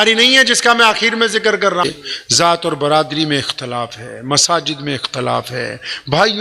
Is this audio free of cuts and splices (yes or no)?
no